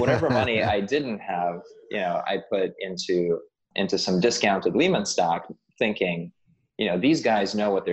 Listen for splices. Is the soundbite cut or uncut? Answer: uncut